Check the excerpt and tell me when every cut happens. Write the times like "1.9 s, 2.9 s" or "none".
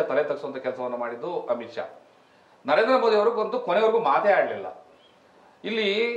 none